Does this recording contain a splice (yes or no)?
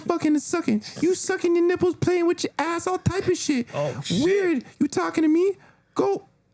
no